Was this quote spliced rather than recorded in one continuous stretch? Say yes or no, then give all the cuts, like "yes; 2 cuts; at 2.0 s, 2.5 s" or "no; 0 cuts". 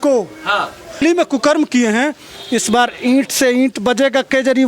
yes; 1 cut; at 1.0 s